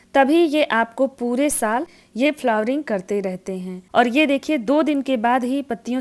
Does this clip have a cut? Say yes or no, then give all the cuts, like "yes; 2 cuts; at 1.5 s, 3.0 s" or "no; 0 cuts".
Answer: yes; 2 cuts; at 1.9 s, 3.7 s